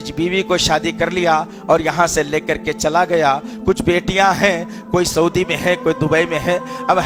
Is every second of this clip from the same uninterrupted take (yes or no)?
yes